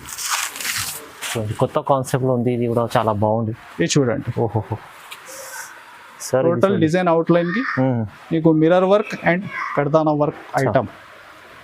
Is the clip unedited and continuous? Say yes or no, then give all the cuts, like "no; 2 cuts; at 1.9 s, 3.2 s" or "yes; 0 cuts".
yes; 0 cuts